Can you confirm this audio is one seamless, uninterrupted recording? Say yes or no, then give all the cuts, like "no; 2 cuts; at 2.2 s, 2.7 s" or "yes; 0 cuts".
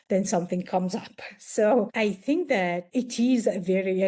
no; 2 cuts; at 1.9 s, 2.9 s